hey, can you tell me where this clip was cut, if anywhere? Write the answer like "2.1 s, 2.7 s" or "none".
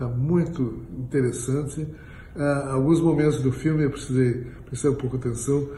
none